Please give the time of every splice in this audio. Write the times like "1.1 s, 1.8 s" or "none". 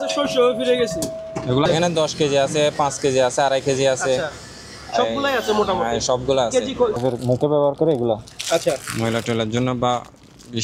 1.7 s, 7.0 s

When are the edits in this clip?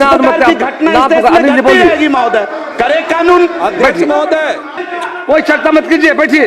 4.9 s

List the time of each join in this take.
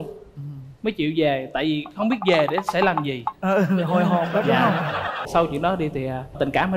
5.2 s

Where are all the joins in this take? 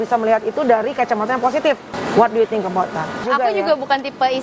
1.9 s, 3.2 s

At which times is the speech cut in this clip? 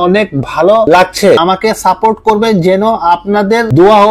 1.4 s

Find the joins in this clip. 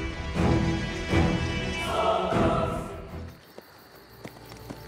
2.3 s

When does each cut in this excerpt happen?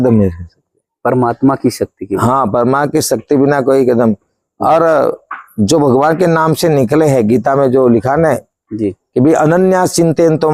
none

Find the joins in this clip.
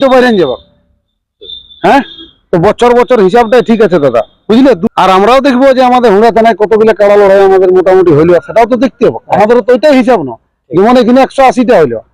4.8 s

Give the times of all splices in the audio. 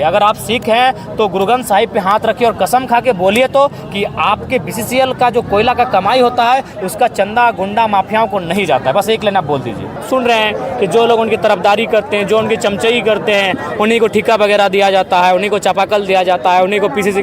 10.0 s

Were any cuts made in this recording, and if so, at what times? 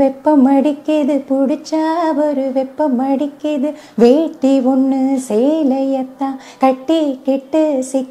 none

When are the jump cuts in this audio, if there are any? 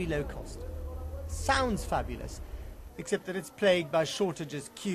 2.1 s

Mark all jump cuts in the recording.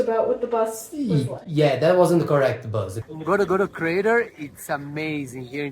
3.0 s

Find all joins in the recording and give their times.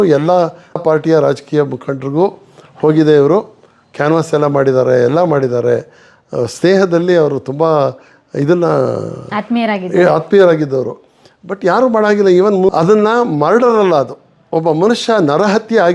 12.7 s

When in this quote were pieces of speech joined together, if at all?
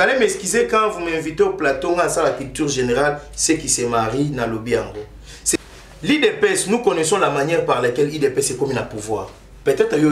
5.6 s

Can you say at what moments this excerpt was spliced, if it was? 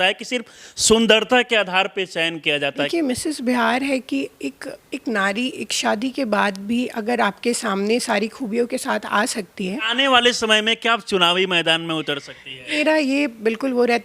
2.9 s, 9.9 s, 12.8 s

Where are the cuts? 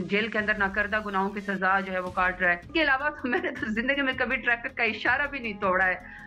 2.7 s

